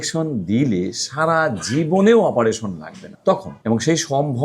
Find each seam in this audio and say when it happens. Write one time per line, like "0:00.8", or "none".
0:03.4